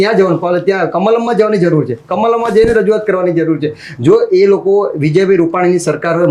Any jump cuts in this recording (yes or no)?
no